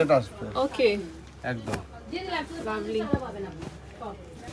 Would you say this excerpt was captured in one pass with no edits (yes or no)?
yes